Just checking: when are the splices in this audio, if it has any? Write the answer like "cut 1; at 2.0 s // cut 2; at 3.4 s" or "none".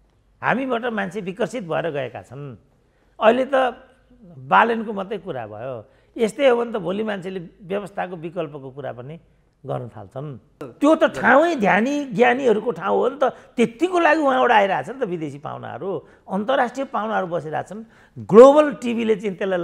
cut 1; at 10.7 s